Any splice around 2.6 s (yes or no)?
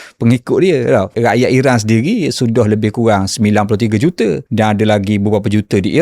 no